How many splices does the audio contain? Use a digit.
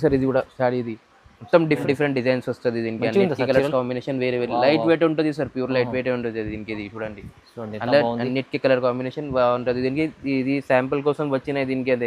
1